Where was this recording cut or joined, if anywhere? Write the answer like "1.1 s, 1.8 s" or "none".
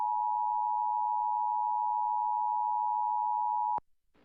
none